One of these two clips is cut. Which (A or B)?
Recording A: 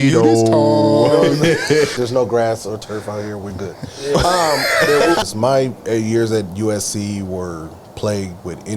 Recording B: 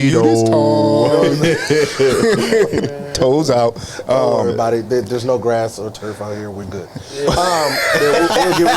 A